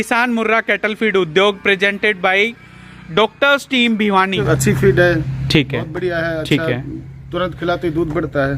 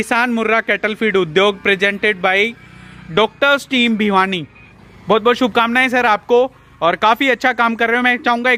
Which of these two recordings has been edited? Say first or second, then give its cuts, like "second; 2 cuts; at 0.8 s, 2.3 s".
first; 1 cut; at 4.4 s